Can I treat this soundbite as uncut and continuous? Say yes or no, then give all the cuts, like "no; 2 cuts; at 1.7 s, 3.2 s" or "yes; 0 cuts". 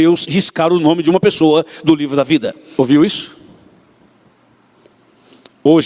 no; 1 cut; at 2.6 s